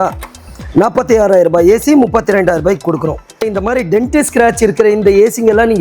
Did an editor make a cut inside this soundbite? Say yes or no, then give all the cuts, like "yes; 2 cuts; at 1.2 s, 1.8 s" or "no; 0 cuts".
yes; 1 cut; at 3.3 s